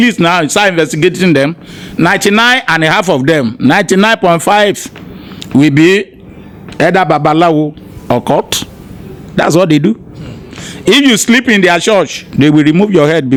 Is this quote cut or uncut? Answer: uncut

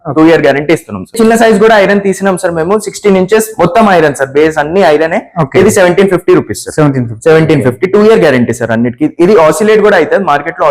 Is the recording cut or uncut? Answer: cut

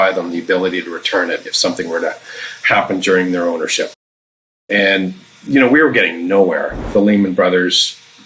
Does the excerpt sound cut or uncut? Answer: cut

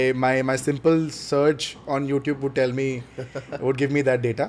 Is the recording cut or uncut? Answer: uncut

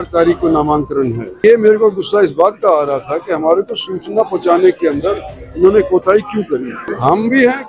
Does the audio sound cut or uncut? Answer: cut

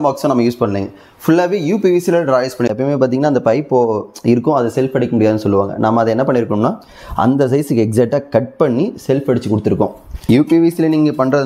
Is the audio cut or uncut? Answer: cut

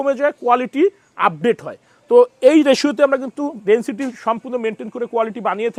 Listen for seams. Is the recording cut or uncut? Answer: uncut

